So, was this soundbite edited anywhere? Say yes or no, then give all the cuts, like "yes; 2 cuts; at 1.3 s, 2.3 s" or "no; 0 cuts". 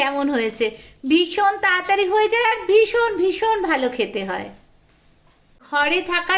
no; 0 cuts